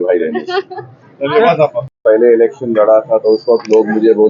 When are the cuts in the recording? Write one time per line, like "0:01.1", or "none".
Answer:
0:01.9